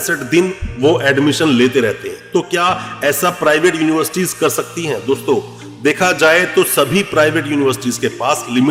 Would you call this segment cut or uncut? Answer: uncut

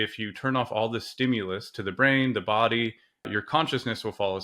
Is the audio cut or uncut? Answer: cut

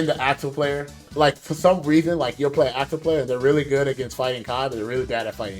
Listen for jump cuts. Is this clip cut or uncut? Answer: cut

